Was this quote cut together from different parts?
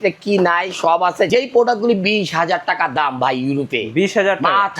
yes; 1 cut; at 1.3 s

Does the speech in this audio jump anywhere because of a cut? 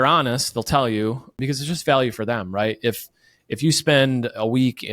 yes; 1 cut; at 1.4 s

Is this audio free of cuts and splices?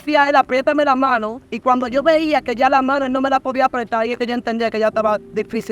yes; 0 cuts

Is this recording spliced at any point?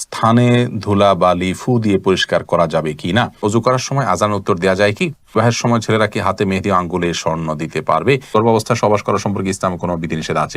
yes; 3 cuts; at 3.4 s, 5.3 s, 8.3 s

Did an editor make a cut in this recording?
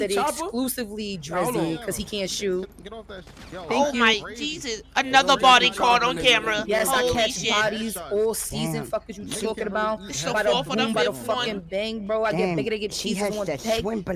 no; 0 cuts

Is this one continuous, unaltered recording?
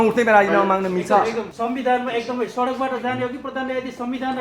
no; 1 cut; at 1.5 s

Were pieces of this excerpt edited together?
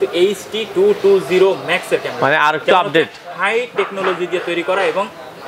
no; 0 cuts

